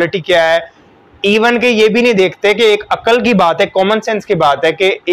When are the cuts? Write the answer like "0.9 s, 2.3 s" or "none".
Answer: none